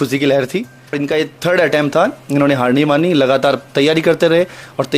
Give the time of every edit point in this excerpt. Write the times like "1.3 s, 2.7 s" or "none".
1.0 s